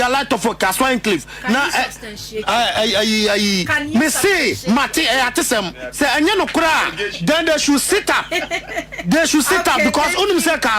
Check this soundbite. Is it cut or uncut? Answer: uncut